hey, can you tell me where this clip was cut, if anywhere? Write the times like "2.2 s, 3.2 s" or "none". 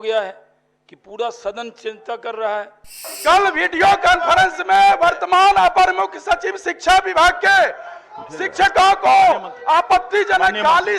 3.1 s